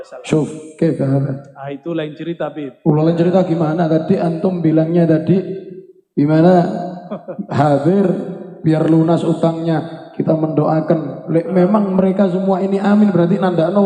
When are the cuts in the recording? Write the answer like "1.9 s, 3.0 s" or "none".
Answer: none